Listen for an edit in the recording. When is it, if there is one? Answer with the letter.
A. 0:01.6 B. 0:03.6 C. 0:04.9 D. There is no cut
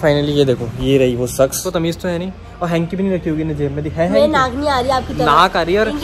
A